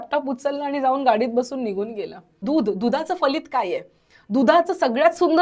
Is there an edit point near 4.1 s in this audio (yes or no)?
no